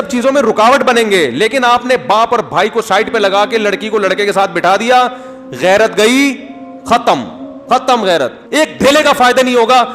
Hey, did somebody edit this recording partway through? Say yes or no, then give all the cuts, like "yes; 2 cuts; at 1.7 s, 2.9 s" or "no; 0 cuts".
yes; 1 cut; at 8.4 s